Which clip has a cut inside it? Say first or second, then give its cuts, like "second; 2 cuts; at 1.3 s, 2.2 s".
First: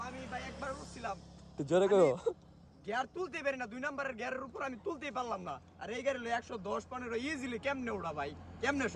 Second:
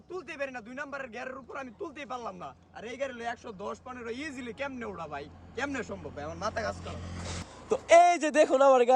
second; 1 cut; at 7.6 s